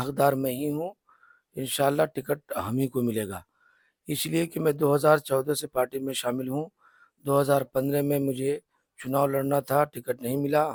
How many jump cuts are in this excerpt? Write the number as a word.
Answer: zero